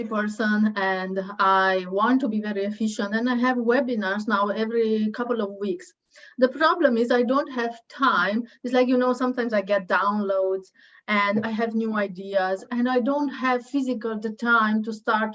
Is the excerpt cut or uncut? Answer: uncut